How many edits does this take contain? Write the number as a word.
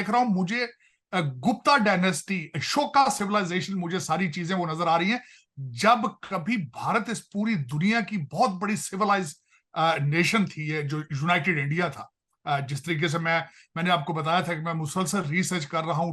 zero